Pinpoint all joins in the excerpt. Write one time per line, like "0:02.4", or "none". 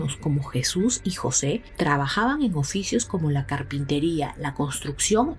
none